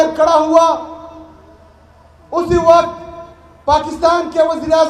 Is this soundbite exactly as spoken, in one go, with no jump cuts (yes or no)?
yes